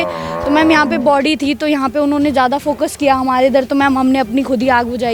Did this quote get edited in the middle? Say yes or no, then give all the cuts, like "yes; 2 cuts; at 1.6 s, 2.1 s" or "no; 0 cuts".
no; 0 cuts